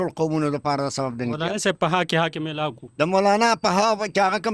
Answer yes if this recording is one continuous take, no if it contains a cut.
yes